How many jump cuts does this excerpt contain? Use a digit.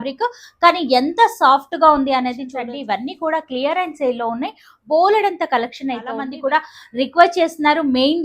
2